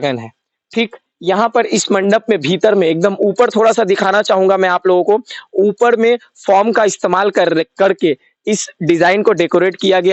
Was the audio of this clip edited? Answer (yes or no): no